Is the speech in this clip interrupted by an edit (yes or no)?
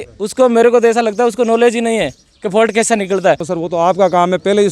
yes